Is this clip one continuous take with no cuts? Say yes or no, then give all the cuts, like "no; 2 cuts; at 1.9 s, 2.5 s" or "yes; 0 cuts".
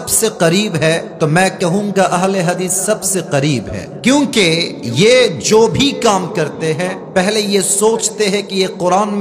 no; 4 cuts; at 1.1 s, 3.8 s, 4.8 s, 7.0 s